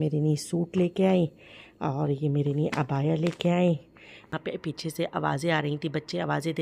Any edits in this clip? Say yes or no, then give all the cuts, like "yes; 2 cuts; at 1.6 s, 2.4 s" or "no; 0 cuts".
yes; 1 cut; at 4.3 s